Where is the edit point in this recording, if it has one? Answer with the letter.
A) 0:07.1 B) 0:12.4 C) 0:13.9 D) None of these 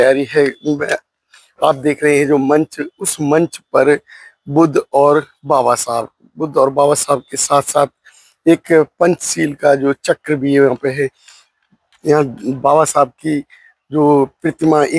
D